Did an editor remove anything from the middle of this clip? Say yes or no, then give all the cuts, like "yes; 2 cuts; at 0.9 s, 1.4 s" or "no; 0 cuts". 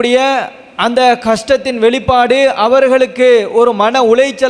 no; 0 cuts